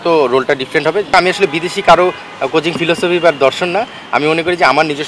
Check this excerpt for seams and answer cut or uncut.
cut